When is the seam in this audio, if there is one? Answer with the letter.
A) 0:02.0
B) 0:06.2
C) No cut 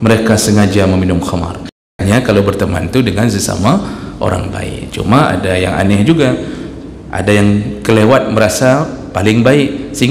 A